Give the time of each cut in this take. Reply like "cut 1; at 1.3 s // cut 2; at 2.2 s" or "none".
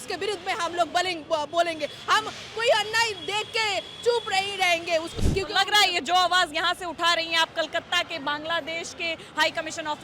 cut 1; at 5.2 s